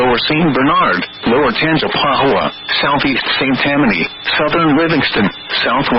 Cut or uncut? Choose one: cut